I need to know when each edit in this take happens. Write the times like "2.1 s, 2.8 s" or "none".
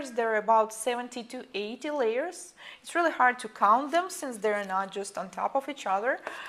2.8 s